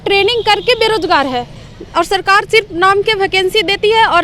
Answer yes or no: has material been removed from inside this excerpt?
no